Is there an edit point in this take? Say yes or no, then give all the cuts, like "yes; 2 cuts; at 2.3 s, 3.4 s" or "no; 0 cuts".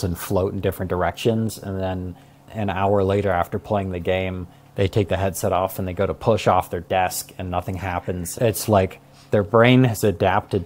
yes; 1 cut; at 2.5 s